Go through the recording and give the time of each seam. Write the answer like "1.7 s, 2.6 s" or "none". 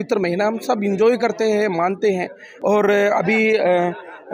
none